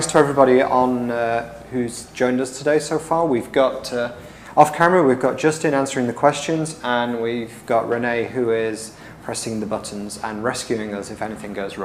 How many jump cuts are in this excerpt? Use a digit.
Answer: 0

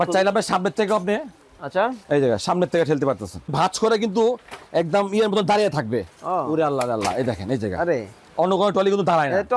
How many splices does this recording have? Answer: 1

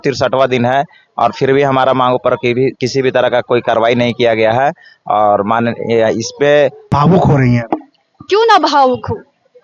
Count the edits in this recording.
1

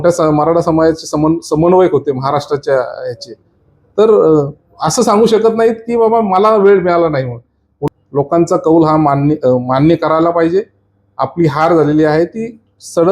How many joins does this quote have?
1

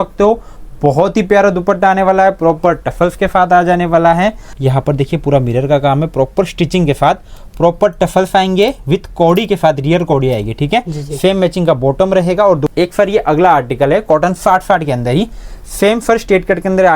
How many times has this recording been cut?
2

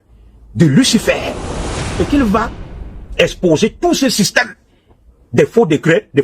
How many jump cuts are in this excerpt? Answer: 1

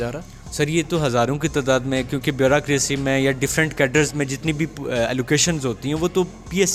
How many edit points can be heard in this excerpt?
0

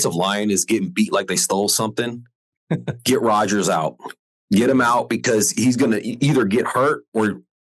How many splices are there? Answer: 0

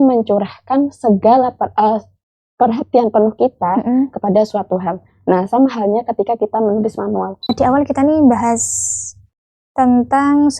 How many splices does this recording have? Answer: 1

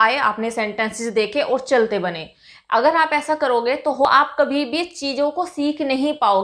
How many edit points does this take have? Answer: 1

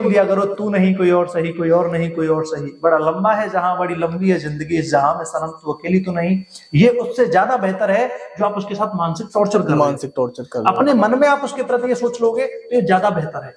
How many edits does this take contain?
0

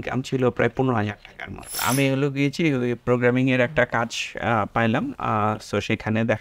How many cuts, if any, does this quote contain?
1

